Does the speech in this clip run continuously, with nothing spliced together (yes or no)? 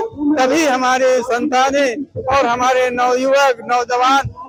yes